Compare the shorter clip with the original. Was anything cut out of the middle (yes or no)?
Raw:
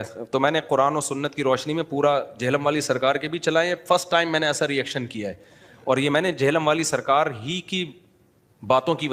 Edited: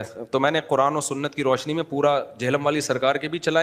no